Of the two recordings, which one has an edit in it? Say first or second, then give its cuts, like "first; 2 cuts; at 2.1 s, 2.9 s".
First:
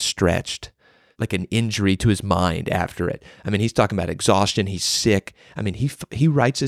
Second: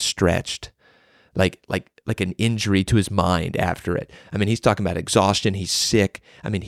first; 1 cut; at 1.1 s